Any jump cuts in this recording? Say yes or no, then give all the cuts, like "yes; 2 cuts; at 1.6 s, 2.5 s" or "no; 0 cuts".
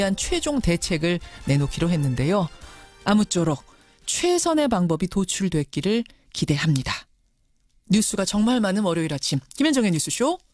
no; 0 cuts